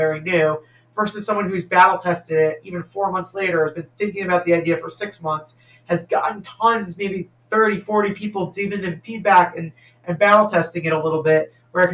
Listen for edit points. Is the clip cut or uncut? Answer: uncut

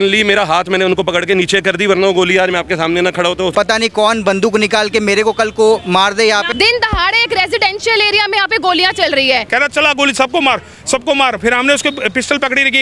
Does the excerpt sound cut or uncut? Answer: cut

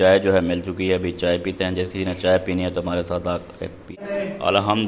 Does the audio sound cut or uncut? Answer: cut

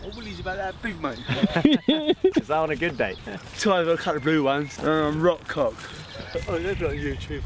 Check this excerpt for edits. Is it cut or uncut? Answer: cut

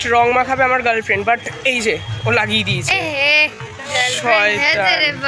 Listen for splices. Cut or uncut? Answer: cut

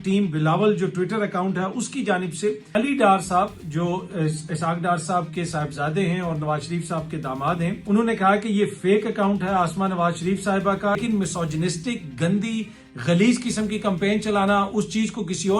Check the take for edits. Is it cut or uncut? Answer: cut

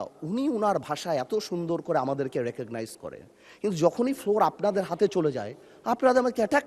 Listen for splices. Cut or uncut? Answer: uncut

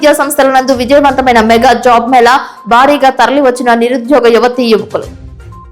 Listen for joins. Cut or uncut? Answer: uncut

